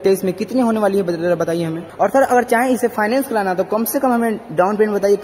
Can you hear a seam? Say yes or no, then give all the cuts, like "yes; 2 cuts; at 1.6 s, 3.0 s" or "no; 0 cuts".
yes; 1 cut; at 1.8 s